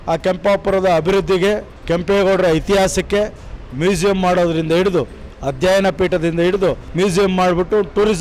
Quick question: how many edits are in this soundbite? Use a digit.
2